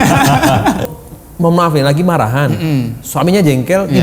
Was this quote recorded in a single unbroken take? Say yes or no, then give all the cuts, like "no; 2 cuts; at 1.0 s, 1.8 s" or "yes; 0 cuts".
no; 1 cut; at 0.9 s